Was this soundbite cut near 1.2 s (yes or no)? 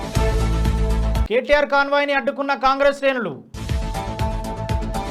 yes